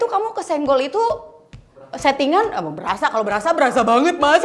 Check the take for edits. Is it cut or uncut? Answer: uncut